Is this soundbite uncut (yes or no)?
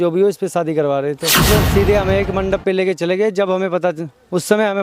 no